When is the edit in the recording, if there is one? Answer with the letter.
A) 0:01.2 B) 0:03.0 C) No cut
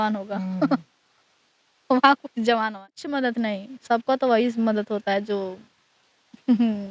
B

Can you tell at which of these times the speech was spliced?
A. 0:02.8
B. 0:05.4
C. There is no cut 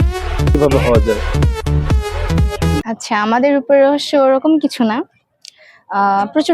A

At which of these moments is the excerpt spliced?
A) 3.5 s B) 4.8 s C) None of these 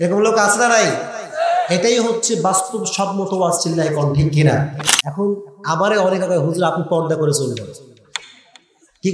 B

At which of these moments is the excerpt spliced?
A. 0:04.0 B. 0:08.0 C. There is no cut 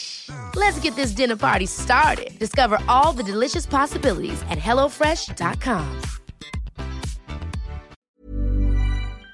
B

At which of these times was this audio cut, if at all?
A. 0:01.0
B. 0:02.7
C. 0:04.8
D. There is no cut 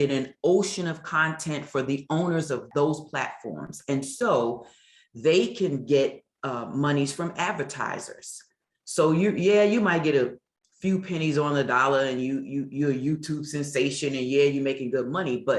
B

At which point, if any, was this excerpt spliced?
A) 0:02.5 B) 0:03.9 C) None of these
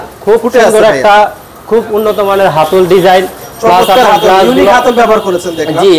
C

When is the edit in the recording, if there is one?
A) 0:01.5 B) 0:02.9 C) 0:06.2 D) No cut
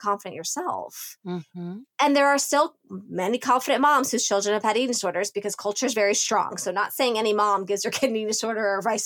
A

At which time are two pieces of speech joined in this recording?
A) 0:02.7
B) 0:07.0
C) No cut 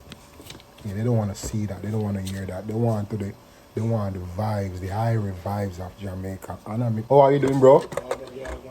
B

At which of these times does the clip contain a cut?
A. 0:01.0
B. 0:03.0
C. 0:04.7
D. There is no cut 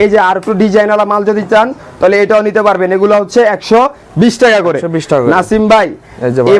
D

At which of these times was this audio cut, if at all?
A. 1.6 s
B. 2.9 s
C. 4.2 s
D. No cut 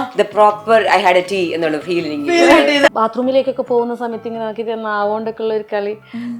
B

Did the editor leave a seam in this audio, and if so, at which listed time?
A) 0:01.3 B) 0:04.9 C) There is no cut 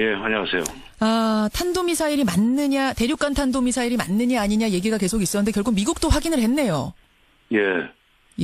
A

